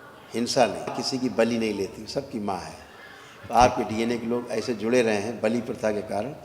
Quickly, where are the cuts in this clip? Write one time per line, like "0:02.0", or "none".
0:00.9